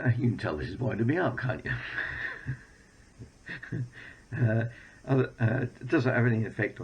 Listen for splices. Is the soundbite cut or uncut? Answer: uncut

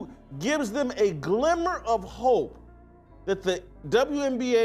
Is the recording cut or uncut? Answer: uncut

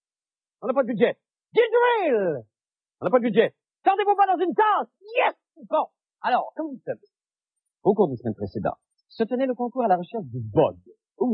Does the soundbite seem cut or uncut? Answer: cut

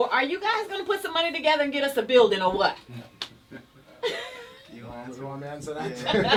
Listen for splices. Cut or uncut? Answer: uncut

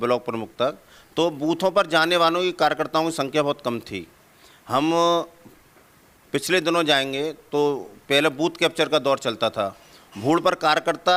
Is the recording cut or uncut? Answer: uncut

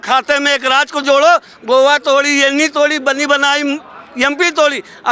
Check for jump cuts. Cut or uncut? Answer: uncut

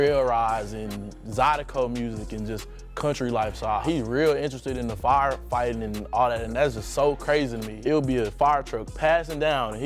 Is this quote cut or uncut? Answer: cut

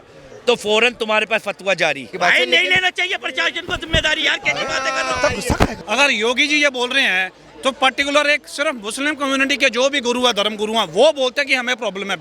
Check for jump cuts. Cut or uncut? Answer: cut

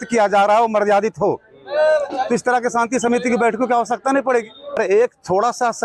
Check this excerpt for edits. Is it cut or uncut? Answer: cut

